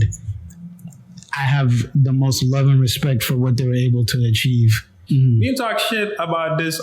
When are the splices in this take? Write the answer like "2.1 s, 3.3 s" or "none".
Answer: 5.0 s